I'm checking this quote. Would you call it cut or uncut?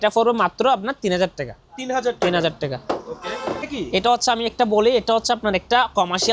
uncut